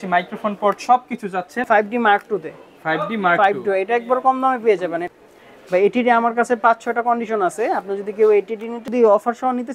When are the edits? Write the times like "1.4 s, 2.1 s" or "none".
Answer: 1.5 s, 5.0 s, 8.8 s